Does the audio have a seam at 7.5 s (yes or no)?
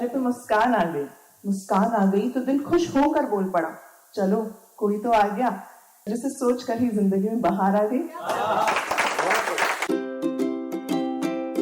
no